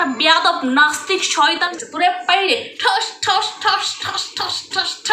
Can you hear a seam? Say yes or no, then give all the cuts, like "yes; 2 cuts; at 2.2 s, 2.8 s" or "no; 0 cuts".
yes; 1 cut; at 1.7 s